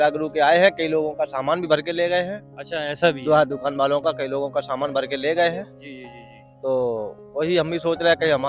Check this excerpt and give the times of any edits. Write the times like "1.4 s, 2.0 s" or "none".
none